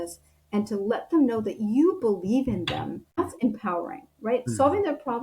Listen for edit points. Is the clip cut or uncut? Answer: cut